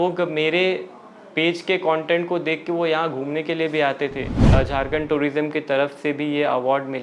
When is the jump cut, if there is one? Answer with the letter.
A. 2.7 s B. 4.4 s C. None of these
B